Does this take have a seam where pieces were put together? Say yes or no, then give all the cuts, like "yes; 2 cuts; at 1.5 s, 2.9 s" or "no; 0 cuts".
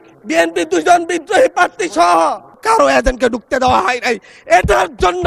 yes; 1 cut; at 2.6 s